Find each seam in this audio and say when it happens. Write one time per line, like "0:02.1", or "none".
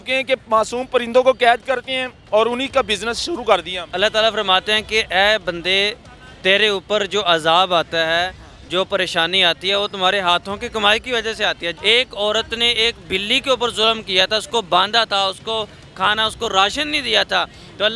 0:03.9
0:11.7